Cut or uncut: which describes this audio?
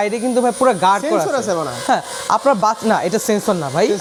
uncut